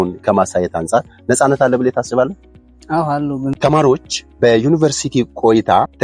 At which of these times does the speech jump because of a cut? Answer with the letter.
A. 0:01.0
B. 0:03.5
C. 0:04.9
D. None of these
B